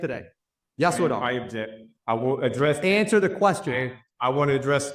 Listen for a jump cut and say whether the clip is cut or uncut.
uncut